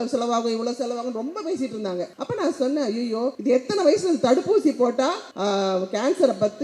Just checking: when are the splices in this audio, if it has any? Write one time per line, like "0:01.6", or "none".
0:02.2
0:03.4
0:05.3